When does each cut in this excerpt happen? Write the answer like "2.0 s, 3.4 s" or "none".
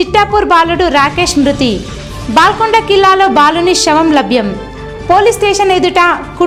none